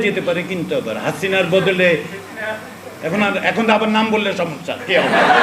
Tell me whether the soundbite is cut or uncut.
uncut